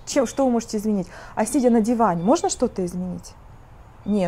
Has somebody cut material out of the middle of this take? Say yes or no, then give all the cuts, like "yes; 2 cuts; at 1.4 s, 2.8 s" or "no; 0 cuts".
no; 0 cuts